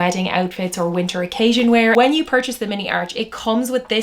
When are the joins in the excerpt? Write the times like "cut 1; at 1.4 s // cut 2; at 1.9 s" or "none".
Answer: cut 1; at 1.9 s